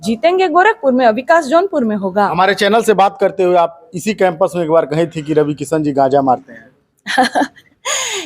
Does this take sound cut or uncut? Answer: uncut